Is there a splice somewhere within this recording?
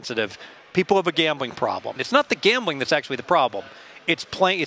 yes; 1 cut; at 2.0 s

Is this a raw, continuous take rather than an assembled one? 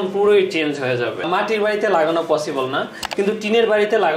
no; 1 cut; at 1.3 s

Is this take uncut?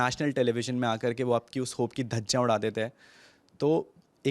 yes; 0 cuts

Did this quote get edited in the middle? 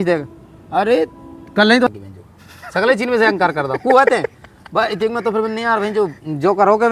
yes; 1 cut; at 1.9 s

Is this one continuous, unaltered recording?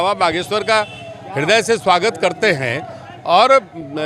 yes; 0 cuts

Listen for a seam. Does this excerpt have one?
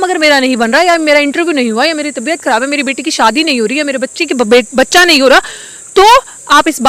no; 0 cuts

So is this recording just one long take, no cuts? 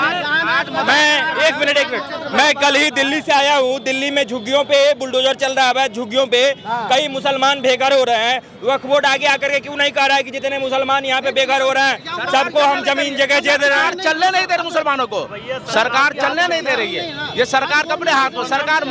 yes; 0 cuts

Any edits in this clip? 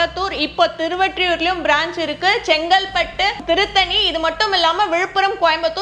yes; 1 cut; at 3.4 s

